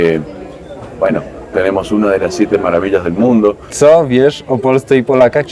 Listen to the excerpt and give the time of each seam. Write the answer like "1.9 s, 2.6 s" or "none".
3.7 s